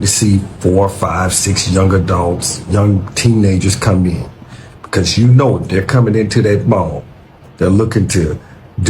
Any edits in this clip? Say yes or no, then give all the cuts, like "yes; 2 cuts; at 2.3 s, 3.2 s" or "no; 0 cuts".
no; 0 cuts